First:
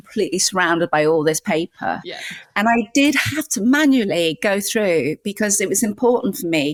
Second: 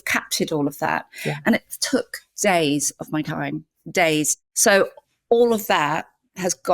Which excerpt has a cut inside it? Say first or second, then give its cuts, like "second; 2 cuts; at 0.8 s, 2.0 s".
second; 2 cuts; at 1.4 s, 4.4 s